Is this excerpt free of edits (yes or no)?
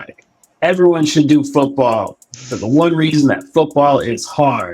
no